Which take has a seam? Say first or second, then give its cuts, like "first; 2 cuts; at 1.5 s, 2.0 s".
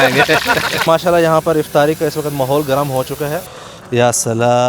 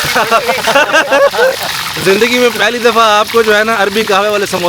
first; 2 cuts; at 0.8 s, 3.5 s